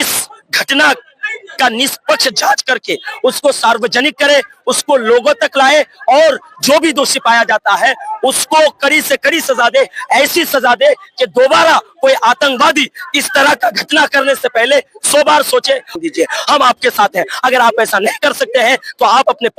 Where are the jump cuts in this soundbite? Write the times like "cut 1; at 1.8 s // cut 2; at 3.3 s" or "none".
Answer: cut 1; at 16.0 s